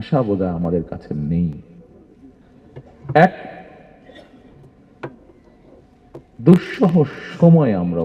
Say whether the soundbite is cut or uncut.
uncut